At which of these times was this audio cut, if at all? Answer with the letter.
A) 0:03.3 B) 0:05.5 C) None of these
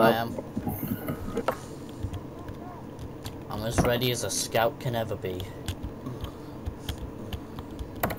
A